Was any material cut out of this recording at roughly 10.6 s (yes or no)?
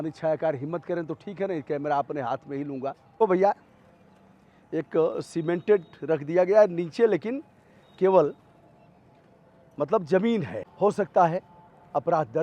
yes